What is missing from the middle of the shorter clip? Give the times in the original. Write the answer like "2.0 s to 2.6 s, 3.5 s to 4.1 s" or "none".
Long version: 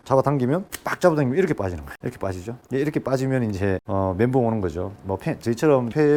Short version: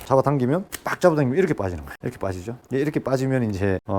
none